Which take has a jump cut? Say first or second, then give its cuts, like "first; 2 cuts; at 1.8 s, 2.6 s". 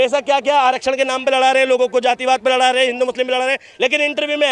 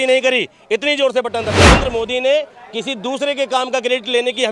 second; 1 cut; at 1.7 s